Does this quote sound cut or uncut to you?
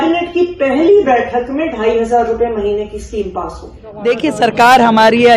cut